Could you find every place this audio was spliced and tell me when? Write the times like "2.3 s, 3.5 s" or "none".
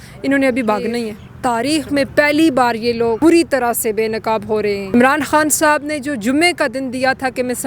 1.2 s, 3.2 s, 4.9 s